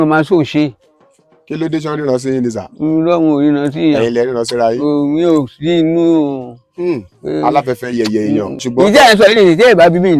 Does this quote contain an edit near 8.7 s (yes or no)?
yes